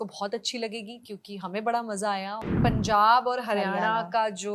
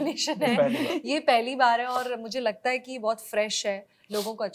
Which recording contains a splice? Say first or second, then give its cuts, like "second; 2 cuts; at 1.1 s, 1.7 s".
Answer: first; 1 cut; at 2.5 s